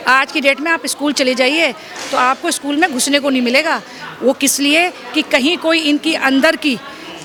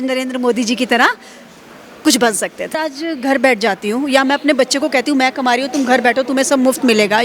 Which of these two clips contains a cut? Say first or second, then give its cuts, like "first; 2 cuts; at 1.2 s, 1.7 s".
second; 1 cut; at 2.8 s